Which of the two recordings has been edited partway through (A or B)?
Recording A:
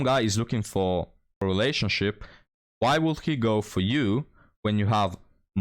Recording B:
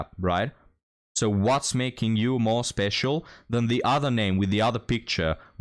A